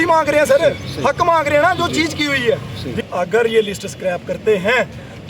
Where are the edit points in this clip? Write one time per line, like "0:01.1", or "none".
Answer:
0:03.0